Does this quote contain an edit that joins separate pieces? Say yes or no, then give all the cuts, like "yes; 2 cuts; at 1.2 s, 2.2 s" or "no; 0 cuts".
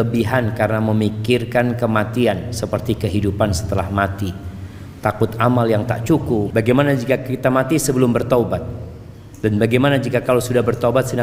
yes; 1 cut; at 6.5 s